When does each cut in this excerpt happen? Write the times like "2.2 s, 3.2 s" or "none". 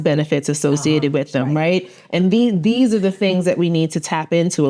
none